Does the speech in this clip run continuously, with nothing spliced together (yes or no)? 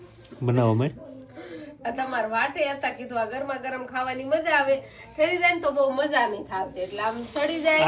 yes